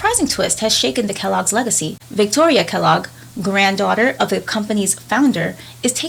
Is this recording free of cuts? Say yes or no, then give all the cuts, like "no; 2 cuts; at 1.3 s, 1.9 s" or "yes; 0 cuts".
yes; 0 cuts